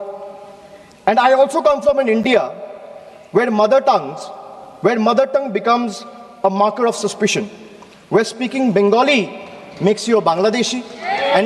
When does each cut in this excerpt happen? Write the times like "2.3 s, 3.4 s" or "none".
none